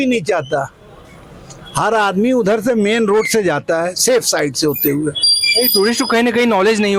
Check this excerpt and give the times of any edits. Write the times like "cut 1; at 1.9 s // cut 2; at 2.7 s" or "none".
none

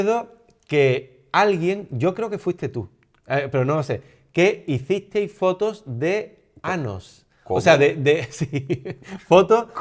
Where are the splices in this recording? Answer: none

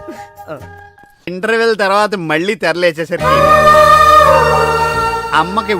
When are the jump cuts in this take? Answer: cut 1; at 1.3 s

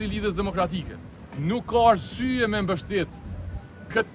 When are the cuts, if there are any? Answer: none

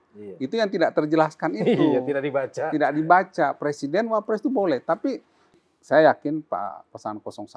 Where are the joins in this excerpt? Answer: cut 1; at 5.6 s

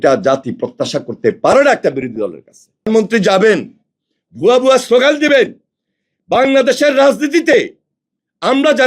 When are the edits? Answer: cut 1; at 2.9 s

